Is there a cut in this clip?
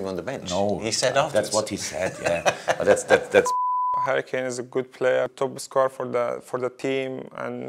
yes; 2 cuts; at 4.0 s, 5.3 s

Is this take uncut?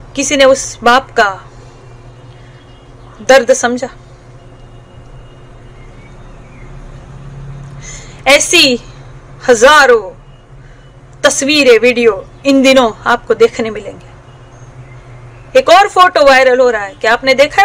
no; 1 cut; at 14.7 s

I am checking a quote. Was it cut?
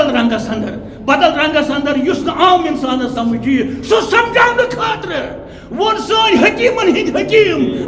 no; 0 cuts

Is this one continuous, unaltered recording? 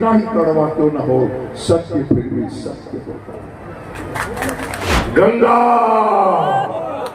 no; 1 cut; at 4.8 s

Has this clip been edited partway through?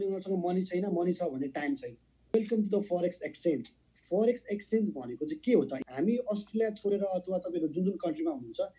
yes; 2 cuts; at 2.3 s, 5.7 s

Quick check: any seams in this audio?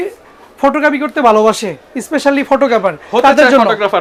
no; 0 cuts

